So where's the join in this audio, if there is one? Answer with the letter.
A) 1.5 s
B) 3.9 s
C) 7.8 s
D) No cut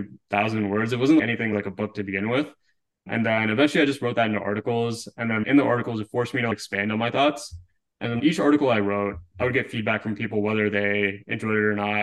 A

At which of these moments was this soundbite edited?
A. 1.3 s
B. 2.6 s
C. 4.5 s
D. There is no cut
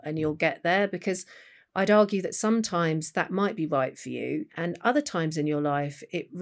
C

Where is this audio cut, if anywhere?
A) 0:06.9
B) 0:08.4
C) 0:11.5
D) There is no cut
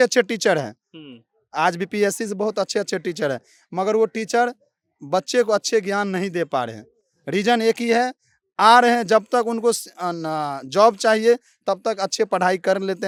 D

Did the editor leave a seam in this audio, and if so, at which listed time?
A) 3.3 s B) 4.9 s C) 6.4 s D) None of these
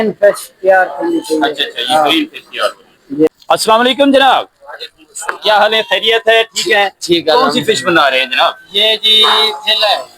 A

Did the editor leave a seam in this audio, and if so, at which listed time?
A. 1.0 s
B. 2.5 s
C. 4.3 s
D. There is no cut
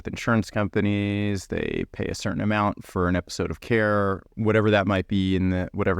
C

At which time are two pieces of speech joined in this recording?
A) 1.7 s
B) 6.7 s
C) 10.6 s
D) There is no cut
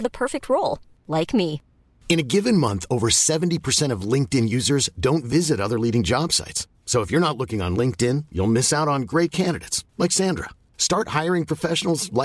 D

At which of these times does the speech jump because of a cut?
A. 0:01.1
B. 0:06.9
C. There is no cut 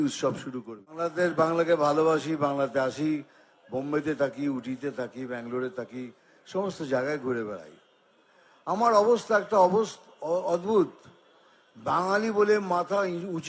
A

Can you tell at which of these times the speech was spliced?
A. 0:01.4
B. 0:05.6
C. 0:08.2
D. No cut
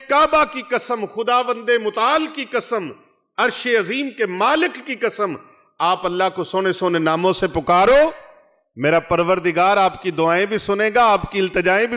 D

